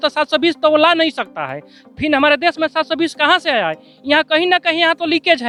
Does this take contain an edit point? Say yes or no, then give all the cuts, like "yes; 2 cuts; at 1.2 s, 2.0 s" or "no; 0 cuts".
no; 0 cuts